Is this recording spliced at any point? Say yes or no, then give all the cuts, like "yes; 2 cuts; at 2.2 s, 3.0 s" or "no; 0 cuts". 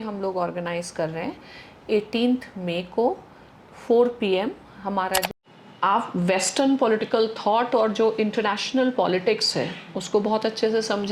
yes; 1 cut; at 5.4 s